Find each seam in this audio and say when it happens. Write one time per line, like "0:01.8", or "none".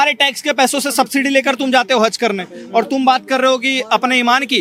none